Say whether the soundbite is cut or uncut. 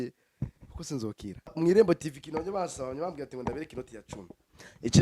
cut